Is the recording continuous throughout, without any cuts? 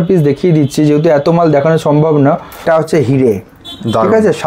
no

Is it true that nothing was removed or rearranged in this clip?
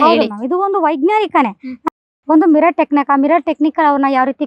no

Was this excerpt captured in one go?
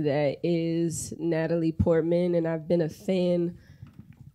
yes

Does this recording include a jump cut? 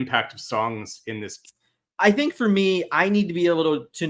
yes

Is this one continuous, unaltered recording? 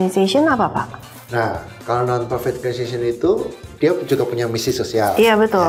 yes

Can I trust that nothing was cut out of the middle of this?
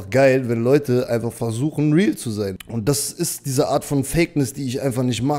no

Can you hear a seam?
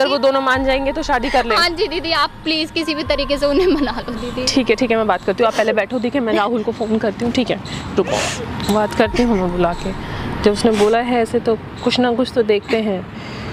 no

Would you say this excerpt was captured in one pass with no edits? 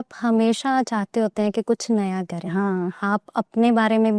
yes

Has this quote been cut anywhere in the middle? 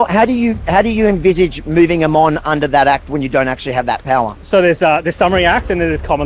no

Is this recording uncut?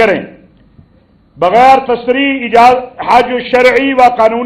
yes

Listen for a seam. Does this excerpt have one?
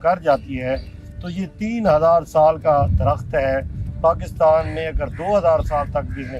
no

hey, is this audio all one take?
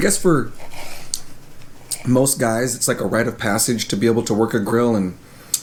yes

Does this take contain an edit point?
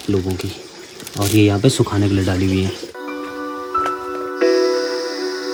no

